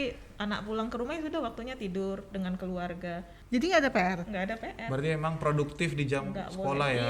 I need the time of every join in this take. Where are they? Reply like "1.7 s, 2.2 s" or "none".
3.3 s